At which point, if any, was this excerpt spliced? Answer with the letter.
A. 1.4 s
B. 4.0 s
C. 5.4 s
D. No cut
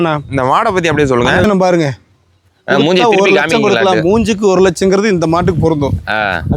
A